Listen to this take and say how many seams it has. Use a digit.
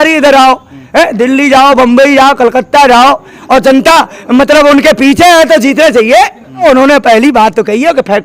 2